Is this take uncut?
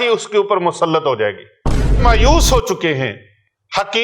no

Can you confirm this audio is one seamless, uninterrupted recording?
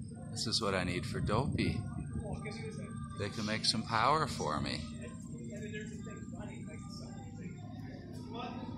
yes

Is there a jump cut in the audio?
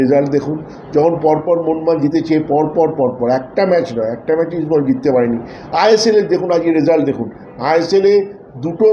no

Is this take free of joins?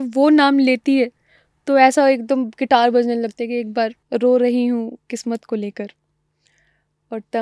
no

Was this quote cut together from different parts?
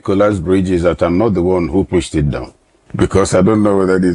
no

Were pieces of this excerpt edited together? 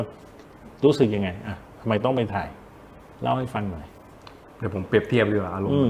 no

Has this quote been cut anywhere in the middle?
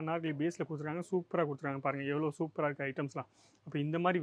no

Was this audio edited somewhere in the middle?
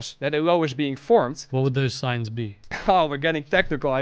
yes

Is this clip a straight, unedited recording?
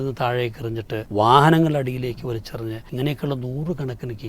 no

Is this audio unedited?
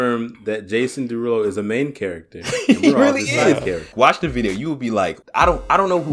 no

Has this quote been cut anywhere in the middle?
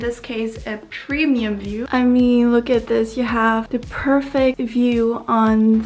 no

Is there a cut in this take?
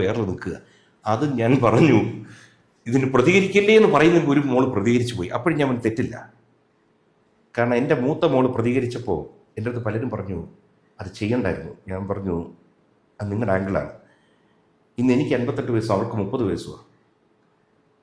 no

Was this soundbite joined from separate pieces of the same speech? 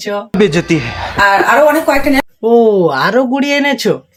no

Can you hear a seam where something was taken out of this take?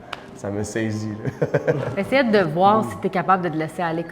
yes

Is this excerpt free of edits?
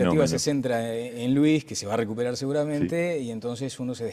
yes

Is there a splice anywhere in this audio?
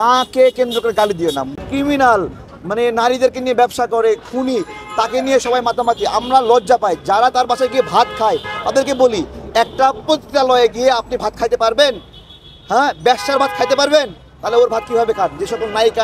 yes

